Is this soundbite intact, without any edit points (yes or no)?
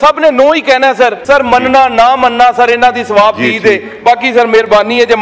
no